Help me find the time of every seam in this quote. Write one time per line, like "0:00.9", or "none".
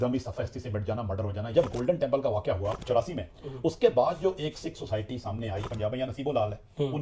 0:01.5
0:02.8
0:05.7